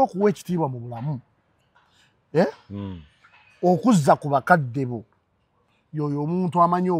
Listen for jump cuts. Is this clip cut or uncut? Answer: uncut